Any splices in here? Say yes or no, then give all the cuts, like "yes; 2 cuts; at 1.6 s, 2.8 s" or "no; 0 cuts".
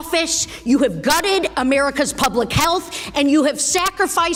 no; 0 cuts